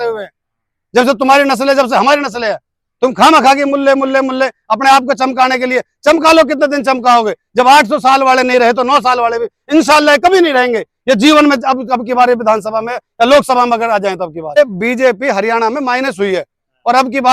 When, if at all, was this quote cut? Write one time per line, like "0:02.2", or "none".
0:14.6